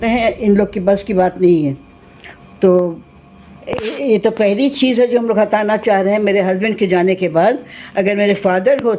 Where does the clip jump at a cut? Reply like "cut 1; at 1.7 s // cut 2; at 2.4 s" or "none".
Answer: none

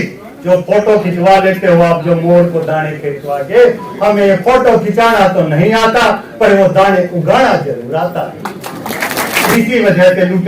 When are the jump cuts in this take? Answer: cut 1; at 9.5 s

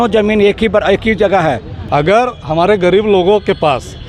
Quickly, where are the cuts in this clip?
cut 1; at 1.7 s

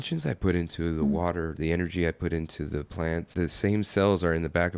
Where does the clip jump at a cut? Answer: cut 1; at 3.3 s

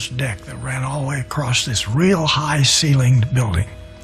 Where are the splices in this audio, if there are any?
none

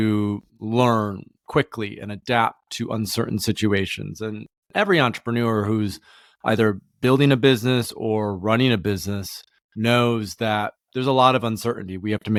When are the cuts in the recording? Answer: none

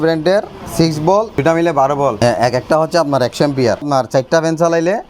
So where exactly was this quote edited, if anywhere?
cut 1; at 1.4 s // cut 2; at 2.2 s // cut 3; at 3.9 s

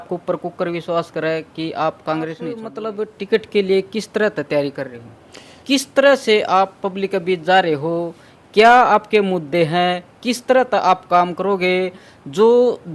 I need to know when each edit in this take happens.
cut 1; at 2.7 s // cut 2; at 5.6 s

